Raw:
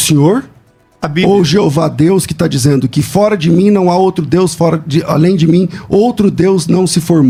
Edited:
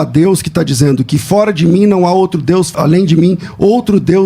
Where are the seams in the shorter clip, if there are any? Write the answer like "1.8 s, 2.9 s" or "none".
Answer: 2.7 s